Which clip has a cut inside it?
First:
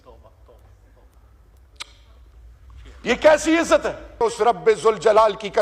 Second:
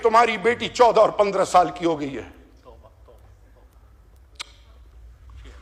first; 1 cut; at 4.2 s

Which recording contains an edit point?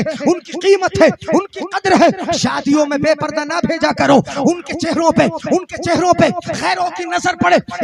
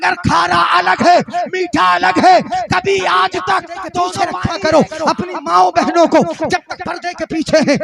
second; 1 cut; at 4.3 s

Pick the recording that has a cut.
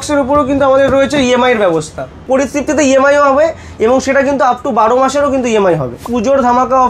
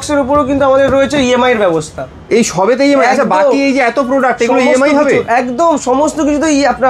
first; 2 cuts; at 2.2 s, 6.0 s

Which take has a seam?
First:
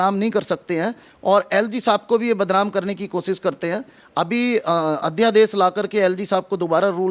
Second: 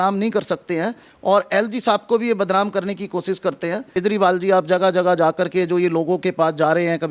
second; 1 cut; at 3.9 s

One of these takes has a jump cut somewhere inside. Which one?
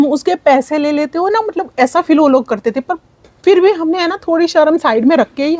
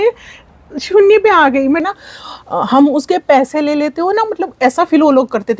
second; 1 cut; at 1.8 s

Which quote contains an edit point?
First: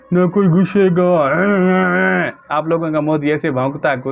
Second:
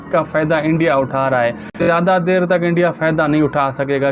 second; 1 cut; at 1.8 s

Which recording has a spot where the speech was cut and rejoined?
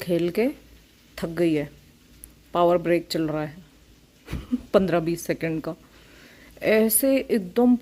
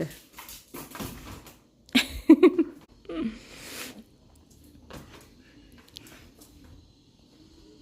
second; 1 cut; at 2.9 s

